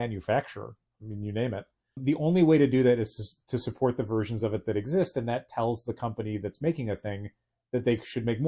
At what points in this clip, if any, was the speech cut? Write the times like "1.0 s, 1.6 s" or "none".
none